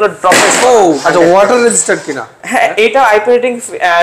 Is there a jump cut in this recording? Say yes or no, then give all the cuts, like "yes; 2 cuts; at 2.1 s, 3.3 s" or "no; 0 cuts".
yes; 1 cut; at 1.0 s